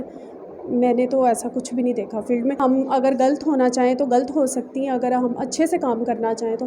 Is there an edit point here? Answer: yes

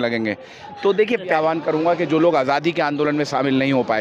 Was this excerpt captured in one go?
no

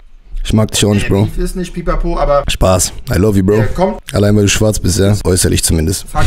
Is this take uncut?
no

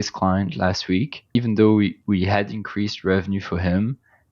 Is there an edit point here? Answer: yes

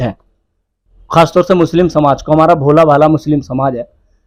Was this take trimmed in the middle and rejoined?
no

